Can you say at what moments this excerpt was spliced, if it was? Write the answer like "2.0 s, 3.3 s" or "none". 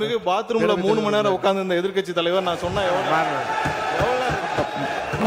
none